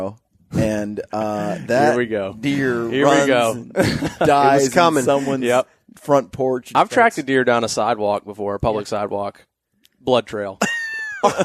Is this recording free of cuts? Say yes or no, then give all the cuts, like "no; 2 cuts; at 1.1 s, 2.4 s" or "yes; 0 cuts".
no; 1 cut; at 6.7 s